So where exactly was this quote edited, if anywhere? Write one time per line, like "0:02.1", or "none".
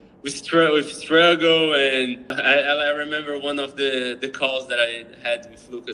0:02.4